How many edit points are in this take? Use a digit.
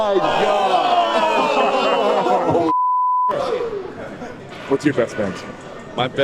1